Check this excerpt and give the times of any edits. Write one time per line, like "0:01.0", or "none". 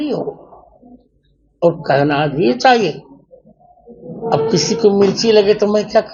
none